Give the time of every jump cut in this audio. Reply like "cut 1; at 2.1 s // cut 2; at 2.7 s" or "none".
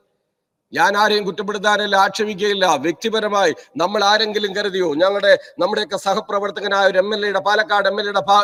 none